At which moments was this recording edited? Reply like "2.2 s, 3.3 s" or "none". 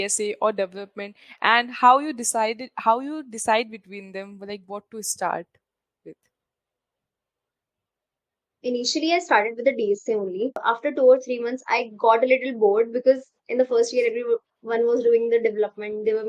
10.6 s